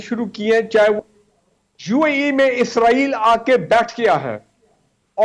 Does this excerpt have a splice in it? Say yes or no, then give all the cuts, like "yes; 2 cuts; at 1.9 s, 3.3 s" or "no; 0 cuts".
yes; 1 cut; at 1.0 s